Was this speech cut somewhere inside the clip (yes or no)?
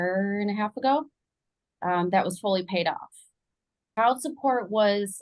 yes